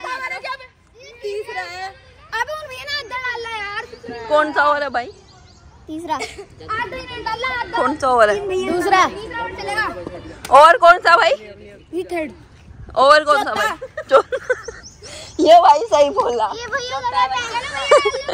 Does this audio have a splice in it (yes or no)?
no